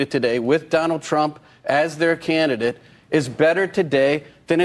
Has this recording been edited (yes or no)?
no